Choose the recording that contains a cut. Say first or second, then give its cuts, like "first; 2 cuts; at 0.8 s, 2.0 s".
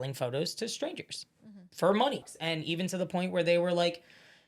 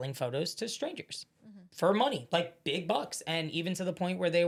first; 1 cut; at 2.2 s